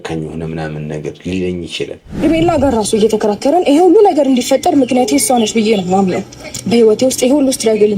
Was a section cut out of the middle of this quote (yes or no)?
yes